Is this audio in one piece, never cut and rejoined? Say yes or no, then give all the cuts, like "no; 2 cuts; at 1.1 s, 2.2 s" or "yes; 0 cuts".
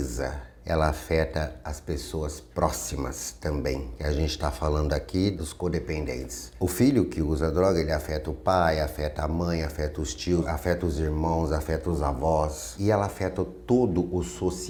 yes; 0 cuts